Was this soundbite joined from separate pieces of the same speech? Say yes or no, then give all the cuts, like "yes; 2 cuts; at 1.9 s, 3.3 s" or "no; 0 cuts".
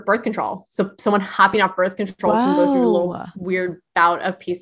no; 0 cuts